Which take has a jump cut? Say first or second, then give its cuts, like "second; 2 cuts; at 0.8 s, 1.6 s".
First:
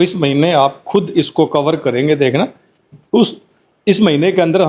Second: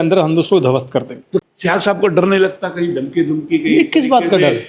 second; 1 cut; at 1.5 s